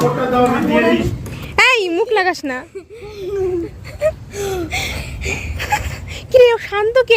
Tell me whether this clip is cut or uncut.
cut